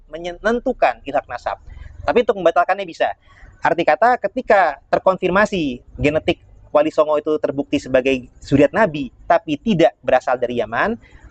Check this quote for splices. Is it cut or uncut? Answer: uncut